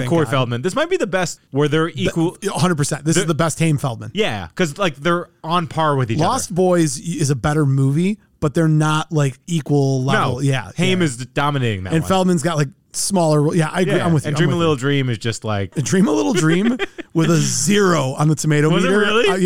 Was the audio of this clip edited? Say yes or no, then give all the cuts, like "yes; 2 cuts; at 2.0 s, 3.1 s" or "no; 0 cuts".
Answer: yes; 1 cut; at 15.7 s